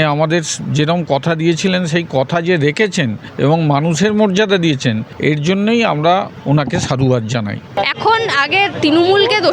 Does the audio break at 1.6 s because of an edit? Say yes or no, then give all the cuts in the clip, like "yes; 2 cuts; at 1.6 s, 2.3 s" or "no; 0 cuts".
no; 4 cuts; at 3.2 s, 5.1 s, 6.3 s, 7.7 s